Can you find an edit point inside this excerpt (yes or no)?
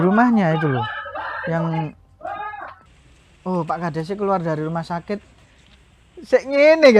yes